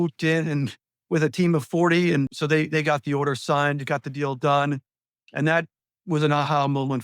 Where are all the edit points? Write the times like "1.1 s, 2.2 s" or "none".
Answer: 2.3 s